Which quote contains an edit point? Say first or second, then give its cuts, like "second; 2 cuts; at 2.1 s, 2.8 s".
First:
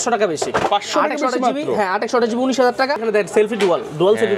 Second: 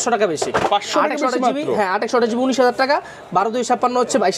first; 1 cut; at 3.0 s